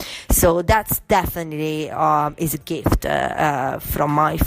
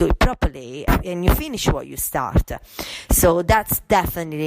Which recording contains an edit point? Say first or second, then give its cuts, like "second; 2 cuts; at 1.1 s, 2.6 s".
second; 1 cut; at 0.9 s